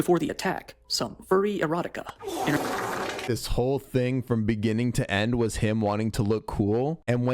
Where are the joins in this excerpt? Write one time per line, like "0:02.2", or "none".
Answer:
0:03.2